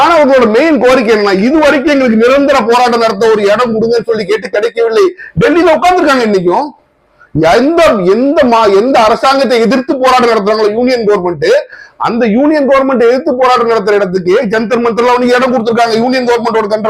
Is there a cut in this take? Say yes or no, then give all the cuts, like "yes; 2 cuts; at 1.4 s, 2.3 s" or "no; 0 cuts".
no; 0 cuts